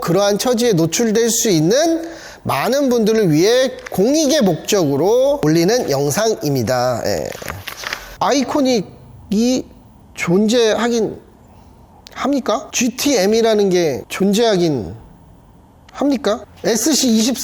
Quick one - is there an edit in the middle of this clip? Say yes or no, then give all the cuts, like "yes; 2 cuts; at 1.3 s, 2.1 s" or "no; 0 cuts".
yes; 4 cuts; at 5.4 s, 8.0 s, 14.1 s, 16.5 s